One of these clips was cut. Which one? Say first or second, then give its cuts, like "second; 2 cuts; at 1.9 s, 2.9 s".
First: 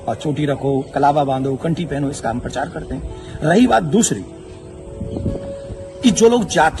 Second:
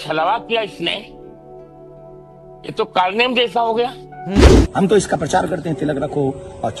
second; 1 cut; at 4.4 s